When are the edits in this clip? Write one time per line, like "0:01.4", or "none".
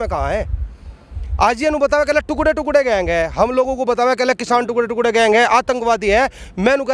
none